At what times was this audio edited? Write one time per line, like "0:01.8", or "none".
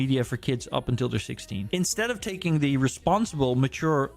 0:01.7